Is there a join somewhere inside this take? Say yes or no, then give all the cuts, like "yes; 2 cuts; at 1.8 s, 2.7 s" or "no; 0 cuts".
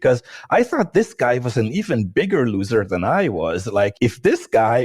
yes; 1 cut; at 3.9 s